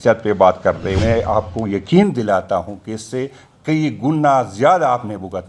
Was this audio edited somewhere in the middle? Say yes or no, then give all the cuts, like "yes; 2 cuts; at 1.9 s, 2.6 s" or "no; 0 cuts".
yes; 1 cut; at 1.0 s